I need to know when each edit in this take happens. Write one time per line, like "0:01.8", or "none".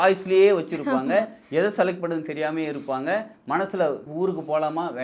0:04.1